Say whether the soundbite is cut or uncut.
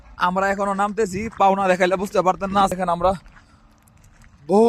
cut